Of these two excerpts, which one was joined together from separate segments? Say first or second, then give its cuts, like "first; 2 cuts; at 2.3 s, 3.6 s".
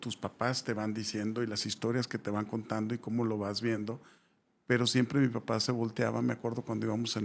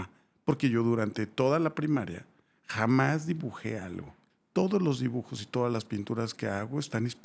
second; 1 cut; at 4.2 s